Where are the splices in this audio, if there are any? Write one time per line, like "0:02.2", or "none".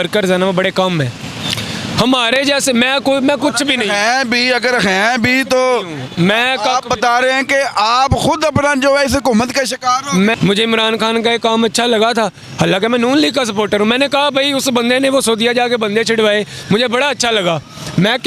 0:10.4